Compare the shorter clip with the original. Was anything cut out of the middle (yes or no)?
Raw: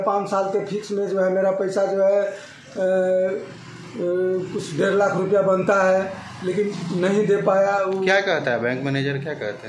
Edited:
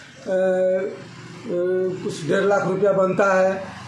no